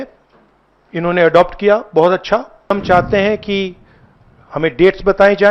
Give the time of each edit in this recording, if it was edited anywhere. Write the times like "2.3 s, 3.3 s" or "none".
2.7 s